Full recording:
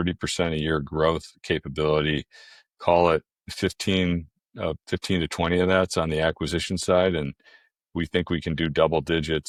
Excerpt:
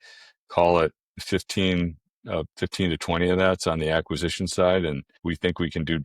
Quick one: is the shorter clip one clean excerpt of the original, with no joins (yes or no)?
no